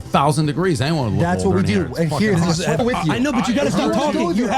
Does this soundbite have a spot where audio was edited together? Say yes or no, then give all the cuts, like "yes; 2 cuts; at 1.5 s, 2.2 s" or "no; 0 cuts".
yes; 1 cut; at 2.8 s